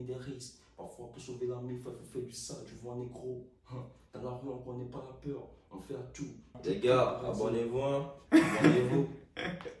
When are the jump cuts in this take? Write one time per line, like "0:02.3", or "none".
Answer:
0:06.6